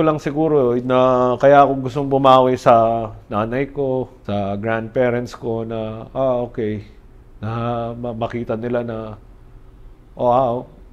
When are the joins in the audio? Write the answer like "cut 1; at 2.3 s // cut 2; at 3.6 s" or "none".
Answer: cut 1; at 4.2 s

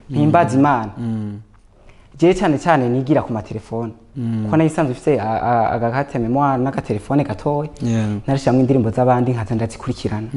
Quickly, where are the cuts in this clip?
none

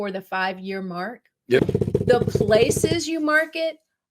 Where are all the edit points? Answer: cut 1; at 1.6 s

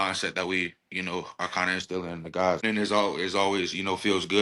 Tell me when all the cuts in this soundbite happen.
cut 1; at 2.6 s

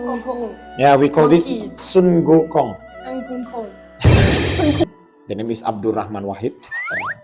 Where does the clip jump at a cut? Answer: cut 1; at 4.9 s

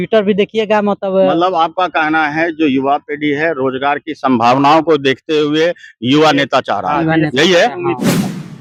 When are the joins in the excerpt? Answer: none

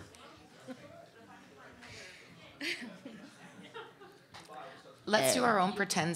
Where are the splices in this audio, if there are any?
none

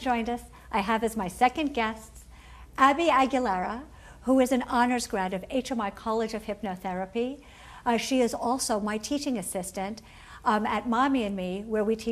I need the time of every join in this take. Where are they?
cut 1; at 3.2 s

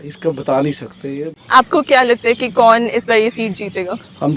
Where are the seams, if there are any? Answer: cut 1; at 1.3 s

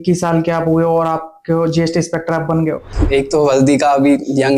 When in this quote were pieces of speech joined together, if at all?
cut 1; at 2.9 s

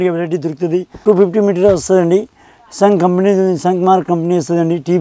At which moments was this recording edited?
cut 1; at 1.0 s

